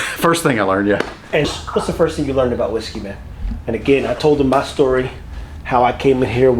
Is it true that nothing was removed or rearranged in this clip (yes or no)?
no